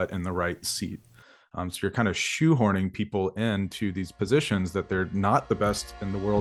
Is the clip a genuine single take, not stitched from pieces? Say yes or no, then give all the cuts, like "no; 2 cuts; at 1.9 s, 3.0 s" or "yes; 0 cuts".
yes; 0 cuts